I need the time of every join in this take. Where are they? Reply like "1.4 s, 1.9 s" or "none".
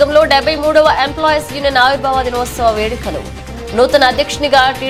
none